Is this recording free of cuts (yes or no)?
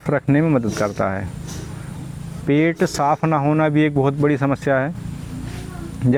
yes